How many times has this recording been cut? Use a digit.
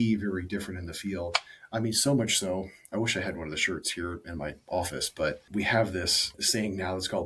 2